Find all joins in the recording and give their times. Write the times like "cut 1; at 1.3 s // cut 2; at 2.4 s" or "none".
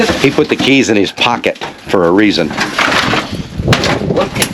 none